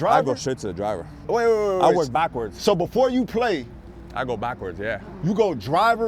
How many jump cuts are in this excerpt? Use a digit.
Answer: 1